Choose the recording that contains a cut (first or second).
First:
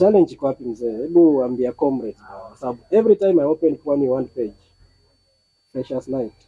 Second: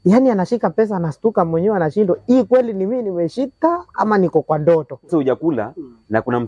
second